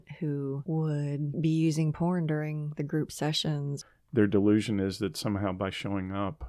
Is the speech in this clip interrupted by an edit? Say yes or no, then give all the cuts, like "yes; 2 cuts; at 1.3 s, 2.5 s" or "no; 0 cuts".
yes; 2 cuts; at 0.7 s, 3.7 s